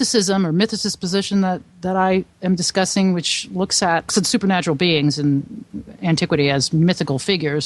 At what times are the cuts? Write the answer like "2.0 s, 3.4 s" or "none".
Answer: 4.1 s